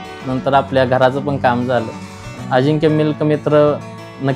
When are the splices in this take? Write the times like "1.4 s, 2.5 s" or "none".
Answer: 2.4 s